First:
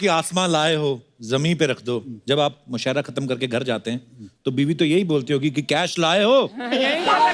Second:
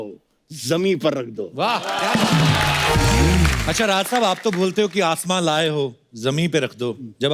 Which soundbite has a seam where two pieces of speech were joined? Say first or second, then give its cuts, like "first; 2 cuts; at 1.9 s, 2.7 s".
second; 1 cut; at 3.6 s